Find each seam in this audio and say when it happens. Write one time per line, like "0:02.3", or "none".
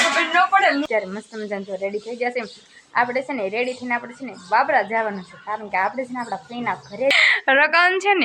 0:00.9
0:07.1

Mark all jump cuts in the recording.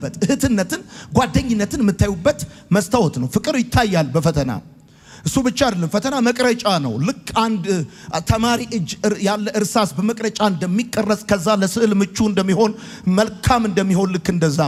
none

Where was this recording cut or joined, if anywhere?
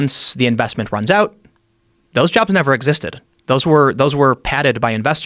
none

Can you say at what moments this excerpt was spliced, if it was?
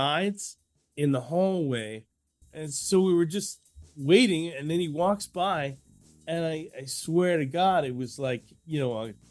0:02.4

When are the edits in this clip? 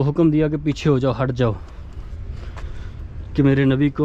none

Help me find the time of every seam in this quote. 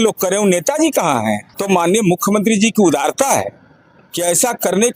0:01.5

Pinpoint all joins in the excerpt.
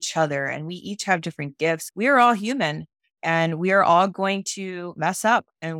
0:01.9

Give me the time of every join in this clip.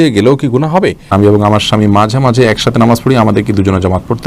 0:01.1

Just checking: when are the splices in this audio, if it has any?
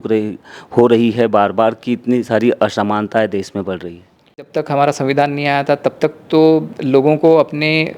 0:04.5

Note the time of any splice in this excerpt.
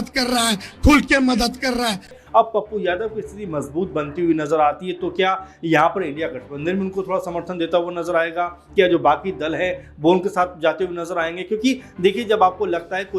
0:02.1

